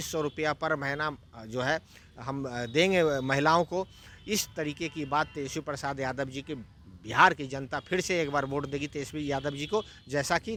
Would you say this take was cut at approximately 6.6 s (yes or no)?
no